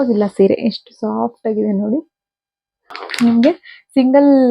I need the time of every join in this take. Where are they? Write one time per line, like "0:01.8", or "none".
0:03.0